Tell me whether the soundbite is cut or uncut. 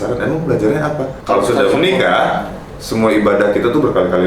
cut